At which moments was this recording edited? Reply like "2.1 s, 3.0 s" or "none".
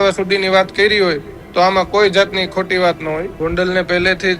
3.3 s